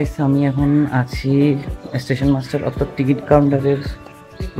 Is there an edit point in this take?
no; 0 cuts

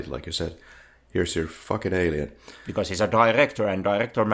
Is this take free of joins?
no; 1 cut; at 2.6 s

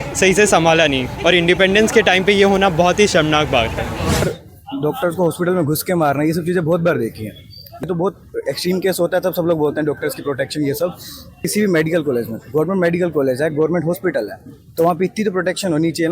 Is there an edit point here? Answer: yes; 3 cuts; at 4.2 s, 7.8 s, 11.4 s

